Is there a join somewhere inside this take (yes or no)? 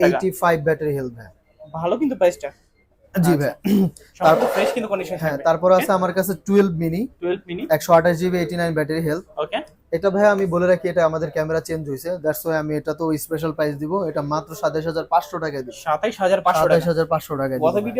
no